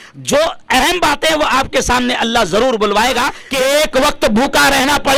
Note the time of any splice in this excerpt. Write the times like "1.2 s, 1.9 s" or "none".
3.4 s